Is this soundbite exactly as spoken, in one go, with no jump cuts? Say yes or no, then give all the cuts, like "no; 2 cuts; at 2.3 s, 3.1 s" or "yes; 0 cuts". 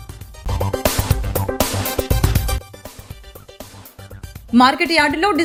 yes; 0 cuts